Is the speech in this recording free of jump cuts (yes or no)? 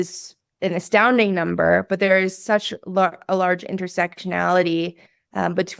yes